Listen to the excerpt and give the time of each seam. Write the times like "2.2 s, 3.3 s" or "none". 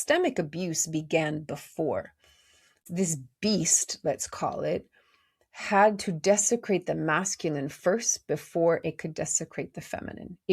2.8 s